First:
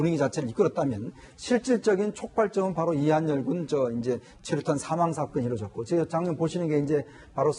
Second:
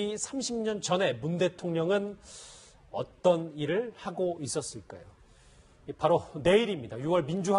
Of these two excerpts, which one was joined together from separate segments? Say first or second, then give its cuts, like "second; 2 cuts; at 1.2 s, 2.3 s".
first; 1 cut; at 2.7 s